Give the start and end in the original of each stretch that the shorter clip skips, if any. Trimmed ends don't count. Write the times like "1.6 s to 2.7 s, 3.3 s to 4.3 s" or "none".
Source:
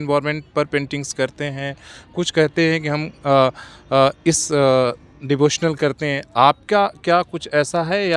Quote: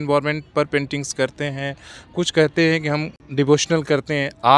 3.1 s to 5.0 s